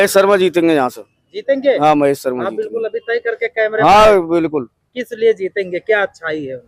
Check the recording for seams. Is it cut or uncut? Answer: uncut